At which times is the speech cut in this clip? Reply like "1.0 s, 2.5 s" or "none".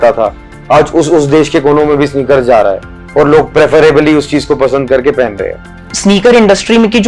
none